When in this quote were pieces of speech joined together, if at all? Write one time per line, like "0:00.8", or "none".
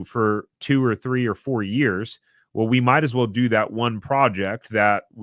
none